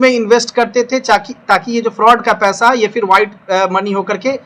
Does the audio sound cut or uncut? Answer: uncut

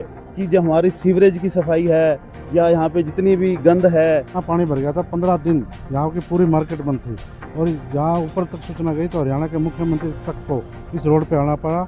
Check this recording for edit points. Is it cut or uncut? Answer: cut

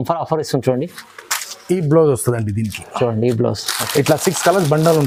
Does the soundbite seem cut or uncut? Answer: uncut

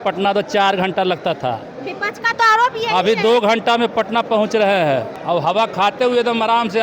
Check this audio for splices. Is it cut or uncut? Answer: cut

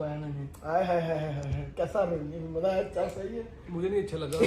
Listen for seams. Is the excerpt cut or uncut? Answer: uncut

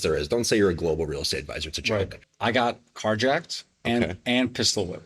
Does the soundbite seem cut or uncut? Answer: cut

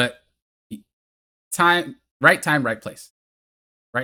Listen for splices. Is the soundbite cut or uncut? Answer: uncut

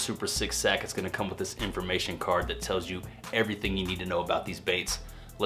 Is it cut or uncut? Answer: uncut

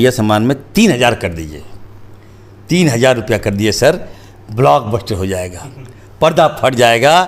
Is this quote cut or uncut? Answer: uncut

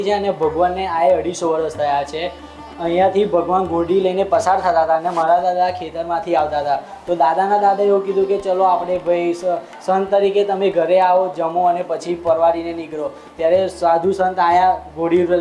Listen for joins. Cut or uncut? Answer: uncut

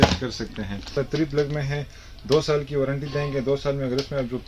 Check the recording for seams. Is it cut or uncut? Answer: cut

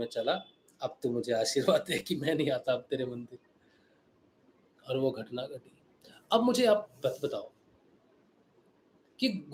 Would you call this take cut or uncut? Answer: uncut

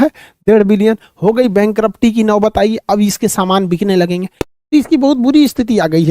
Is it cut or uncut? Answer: cut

